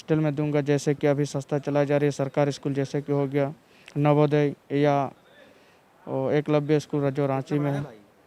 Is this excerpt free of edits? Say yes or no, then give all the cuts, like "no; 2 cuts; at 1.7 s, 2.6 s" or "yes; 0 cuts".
yes; 0 cuts